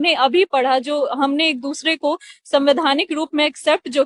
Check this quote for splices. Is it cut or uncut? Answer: uncut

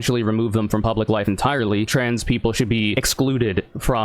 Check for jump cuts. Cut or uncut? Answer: cut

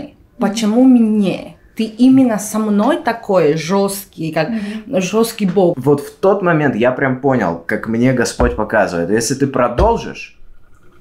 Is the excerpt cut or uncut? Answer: cut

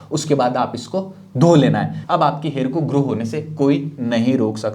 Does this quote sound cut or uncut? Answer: cut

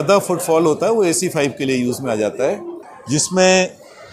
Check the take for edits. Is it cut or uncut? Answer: cut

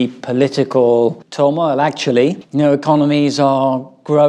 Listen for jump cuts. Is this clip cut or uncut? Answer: uncut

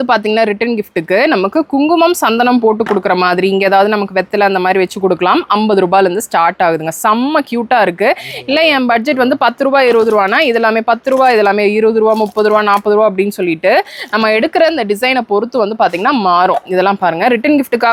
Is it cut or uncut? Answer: uncut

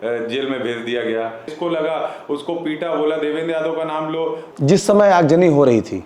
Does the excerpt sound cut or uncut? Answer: cut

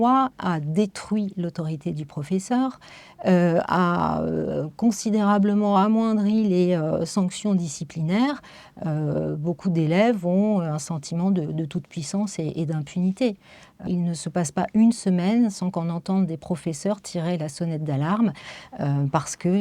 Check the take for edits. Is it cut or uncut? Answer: cut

